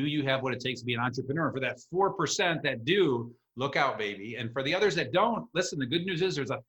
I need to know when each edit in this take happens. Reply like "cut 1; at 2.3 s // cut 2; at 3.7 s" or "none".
none